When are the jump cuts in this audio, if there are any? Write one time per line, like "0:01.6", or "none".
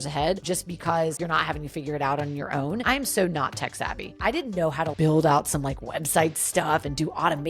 0:02.8